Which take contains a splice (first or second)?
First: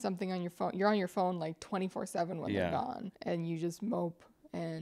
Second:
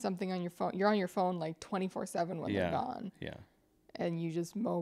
first